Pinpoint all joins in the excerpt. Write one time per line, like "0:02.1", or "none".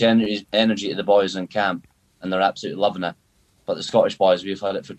0:02.2